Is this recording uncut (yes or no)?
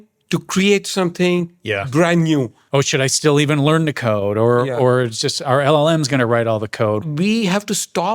no